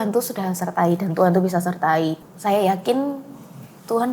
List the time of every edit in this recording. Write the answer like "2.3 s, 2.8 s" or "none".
2.3 s

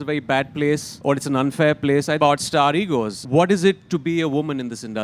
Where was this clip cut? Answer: 0.9 s, 2.2 s, 3.2 s

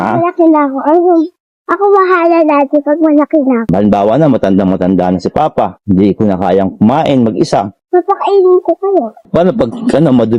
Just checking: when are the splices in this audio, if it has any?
3.7 s, 9.3 s

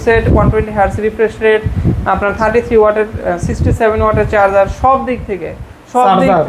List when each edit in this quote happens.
none

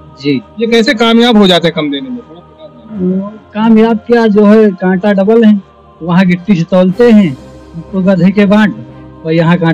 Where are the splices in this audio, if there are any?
none

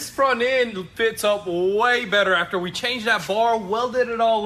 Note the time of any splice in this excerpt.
none

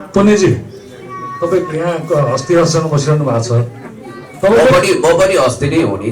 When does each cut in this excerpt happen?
none

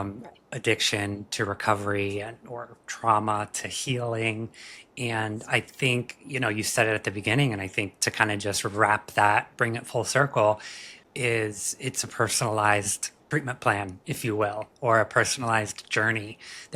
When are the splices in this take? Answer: 10.9 s, 13.2 s

